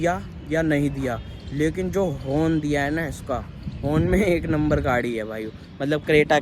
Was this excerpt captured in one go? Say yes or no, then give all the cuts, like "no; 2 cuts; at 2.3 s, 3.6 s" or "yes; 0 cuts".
yes; 0 cuts